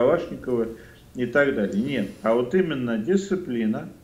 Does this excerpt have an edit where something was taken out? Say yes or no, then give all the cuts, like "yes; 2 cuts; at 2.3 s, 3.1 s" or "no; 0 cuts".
no; 0 cuts